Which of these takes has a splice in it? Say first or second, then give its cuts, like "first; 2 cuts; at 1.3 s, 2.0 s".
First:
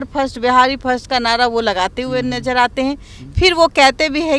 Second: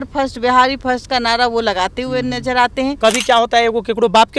second; 1 cut; at 2.9 s